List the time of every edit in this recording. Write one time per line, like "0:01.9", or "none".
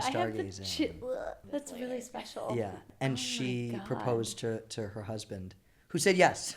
0:01.4
0:02.9